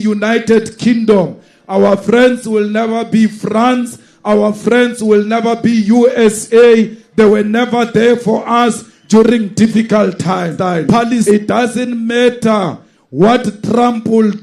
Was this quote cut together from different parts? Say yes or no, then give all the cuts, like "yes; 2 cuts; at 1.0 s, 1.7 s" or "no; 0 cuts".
yes; 1 cut; at 11.2 s